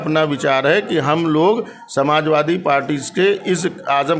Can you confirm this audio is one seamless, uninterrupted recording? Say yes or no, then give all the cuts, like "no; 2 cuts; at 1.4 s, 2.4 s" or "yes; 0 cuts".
yes; 0 cuts